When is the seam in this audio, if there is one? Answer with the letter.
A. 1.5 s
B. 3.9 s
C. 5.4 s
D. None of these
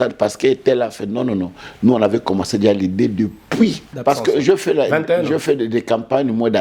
B